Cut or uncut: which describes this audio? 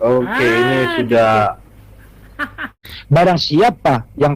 cut